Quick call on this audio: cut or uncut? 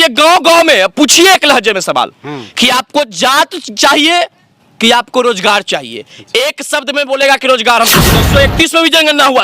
cut